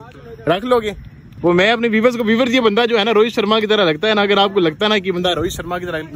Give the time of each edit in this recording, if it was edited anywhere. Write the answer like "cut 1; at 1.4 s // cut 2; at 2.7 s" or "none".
cut 1; at 1.3 s